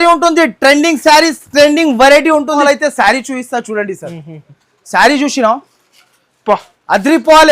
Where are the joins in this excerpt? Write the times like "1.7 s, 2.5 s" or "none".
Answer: 2.6 s